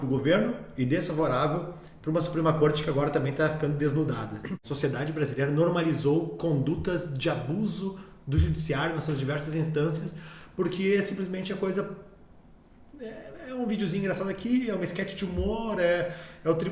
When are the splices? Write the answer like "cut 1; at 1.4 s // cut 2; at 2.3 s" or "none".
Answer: cut 1; at 4.6 s